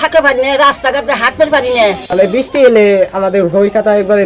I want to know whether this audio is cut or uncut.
cut